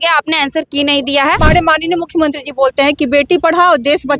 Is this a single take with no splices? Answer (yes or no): no